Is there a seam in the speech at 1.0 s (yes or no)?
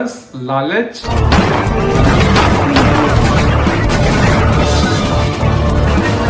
yes